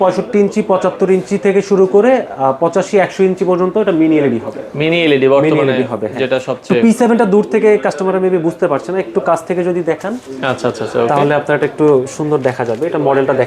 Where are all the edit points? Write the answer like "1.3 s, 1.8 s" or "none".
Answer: none